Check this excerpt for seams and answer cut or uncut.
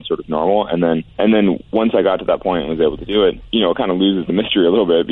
cut